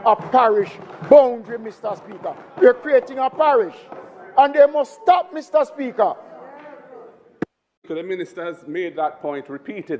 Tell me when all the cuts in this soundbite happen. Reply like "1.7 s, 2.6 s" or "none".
7.9 s